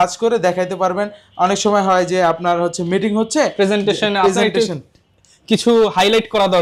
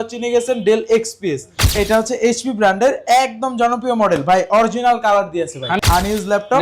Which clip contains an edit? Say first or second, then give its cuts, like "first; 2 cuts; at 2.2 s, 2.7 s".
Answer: second; 2 cuts; at 1.7 s, 5.8 s